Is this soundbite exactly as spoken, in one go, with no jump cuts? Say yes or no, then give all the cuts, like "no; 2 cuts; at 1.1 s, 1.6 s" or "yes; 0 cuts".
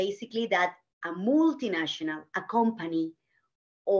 yes; 0 cuts